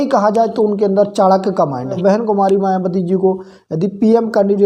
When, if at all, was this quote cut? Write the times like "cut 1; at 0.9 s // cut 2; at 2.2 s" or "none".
cut 1; at 2.0 s